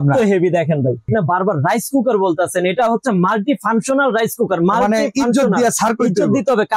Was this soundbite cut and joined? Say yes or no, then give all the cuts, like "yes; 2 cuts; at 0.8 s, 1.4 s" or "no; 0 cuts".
yes; 1 cut; at 1.1 s